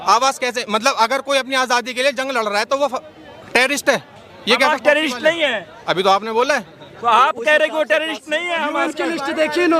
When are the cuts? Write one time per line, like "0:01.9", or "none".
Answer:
none